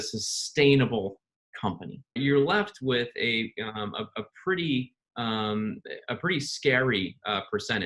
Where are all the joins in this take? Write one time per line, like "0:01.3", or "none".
0:02.2